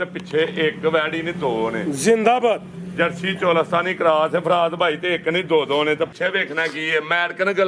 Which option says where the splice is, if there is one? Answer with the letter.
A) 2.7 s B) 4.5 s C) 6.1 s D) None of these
C